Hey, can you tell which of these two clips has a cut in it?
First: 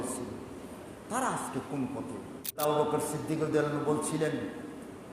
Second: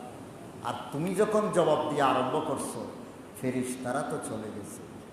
first; 1 cut; at 2.6 s

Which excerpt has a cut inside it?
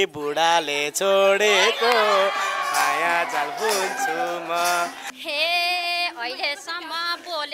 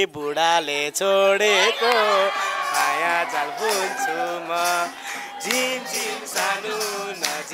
first; 1 cut; at 5.1 s

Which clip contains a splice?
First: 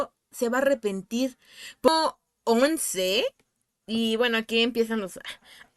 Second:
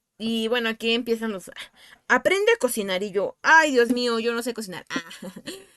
first; 1 cut; at 1.9 s

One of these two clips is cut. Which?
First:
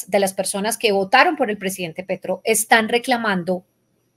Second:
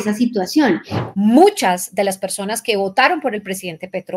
second; 1 cut; at 0.9 s

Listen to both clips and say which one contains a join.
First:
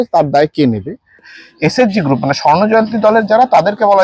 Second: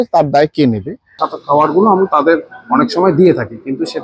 second; 1 cut; at 1.3 s

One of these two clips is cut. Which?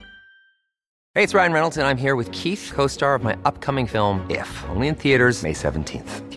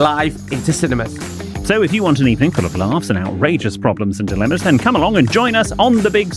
first; 1 cut; at 1.0 s

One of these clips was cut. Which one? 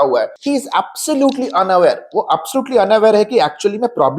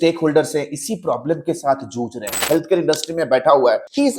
second; 1 cut; at 2.4 s

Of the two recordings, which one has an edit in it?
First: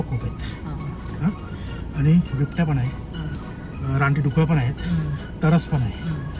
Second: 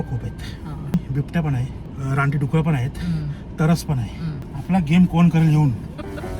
second; 3 cuts; at 0.9 s, 1.8 s, 4.5 s

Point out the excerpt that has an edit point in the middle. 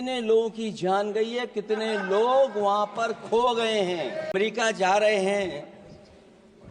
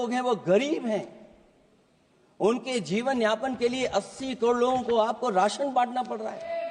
first; 1 cut; at 4.3 s

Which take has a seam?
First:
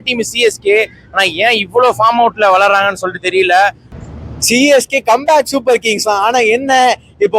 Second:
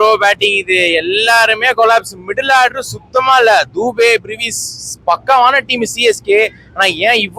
first; 1 cut; at 3.9 s

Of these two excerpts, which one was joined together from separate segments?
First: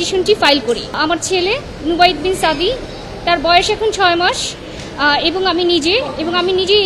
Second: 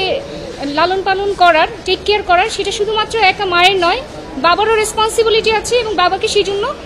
first; 1 cut; at 0.9 s

